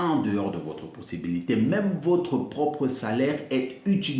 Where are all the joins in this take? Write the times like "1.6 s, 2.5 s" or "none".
none